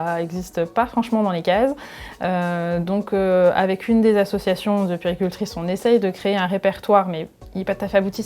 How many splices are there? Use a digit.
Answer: 0